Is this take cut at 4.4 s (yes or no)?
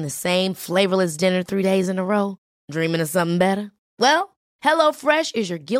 no